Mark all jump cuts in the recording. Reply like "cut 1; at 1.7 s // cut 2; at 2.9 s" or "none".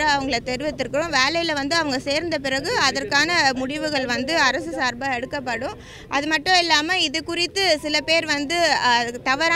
none